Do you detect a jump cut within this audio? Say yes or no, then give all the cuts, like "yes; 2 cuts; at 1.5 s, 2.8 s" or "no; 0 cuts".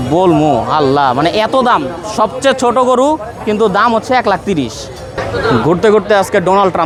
no; 0 cuts